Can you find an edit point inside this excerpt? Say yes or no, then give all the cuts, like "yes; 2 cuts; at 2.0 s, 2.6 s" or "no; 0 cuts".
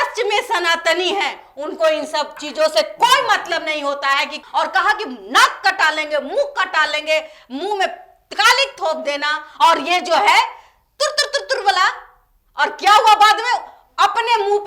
yes; 1 cut; at 4.4 s